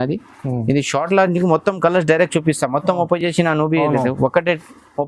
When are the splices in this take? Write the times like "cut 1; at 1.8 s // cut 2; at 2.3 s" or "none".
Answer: none